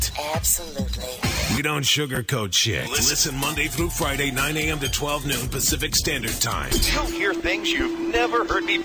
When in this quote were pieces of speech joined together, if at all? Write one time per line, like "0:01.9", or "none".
none